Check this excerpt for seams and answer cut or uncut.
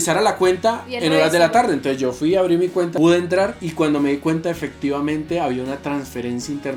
uncut